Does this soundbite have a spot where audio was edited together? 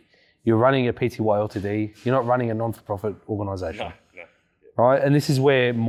no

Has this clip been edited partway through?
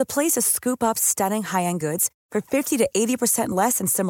no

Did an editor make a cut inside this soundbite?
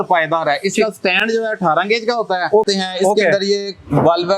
yes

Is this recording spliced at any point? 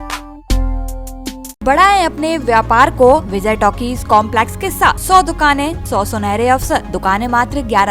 yes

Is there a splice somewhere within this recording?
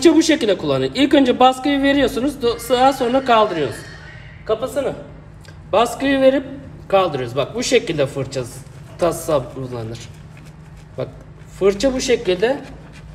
no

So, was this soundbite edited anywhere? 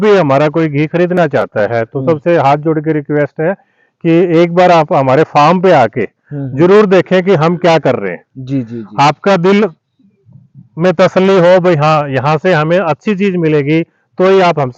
no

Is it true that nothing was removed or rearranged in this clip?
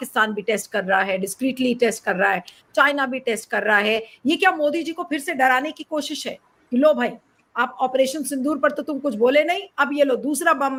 yes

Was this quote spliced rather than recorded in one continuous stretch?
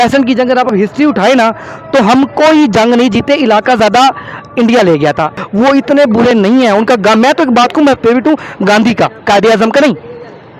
no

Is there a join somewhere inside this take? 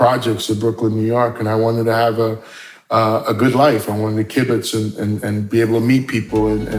no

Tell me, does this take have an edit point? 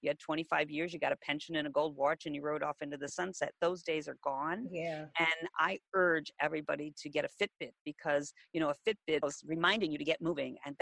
yes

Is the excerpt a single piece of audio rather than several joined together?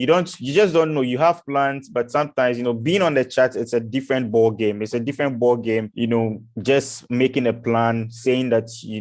no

